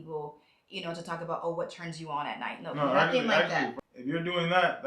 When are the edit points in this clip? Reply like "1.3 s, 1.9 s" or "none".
3.7 s

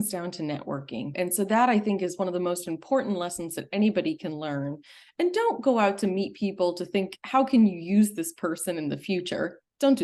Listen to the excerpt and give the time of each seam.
1.0 s

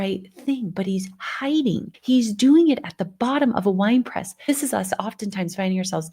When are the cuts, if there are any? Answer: 1.9 s, 4.5 s

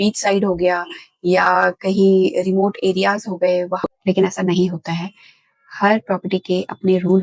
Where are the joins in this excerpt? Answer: 3.9 s

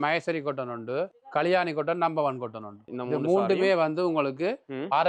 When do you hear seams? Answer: none

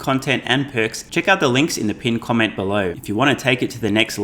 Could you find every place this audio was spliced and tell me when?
1.0 s, 3.0 s

